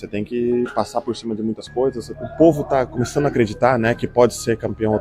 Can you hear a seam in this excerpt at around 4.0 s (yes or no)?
no